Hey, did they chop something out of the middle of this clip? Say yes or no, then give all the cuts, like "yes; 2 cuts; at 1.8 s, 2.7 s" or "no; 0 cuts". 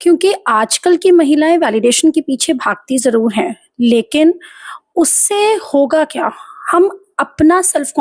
no; 0 cuts